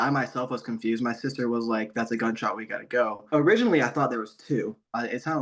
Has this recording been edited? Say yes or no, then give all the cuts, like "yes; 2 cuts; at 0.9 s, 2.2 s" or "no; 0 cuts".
yes; 1 cut; at 3.2 s